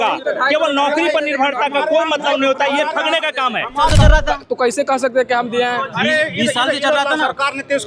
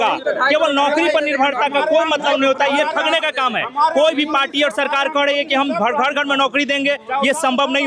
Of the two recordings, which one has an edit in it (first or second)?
first